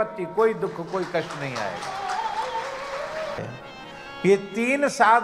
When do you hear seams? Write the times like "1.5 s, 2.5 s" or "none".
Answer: 3.4 s